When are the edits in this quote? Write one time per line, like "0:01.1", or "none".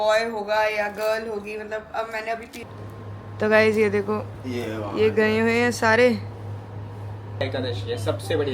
0:02.6
0:07.4